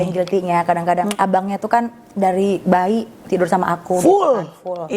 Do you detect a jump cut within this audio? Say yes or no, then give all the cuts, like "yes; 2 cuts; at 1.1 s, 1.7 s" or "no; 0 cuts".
yes; 1 cut; at 1.1 s